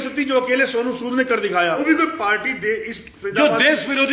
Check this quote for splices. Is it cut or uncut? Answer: cut